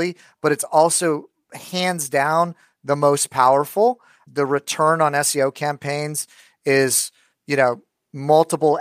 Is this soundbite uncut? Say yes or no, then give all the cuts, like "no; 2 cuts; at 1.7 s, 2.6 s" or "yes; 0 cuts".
yes; 0 cuts